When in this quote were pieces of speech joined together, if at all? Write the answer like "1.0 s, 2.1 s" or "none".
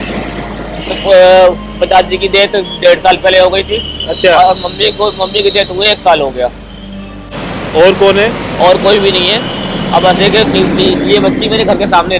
none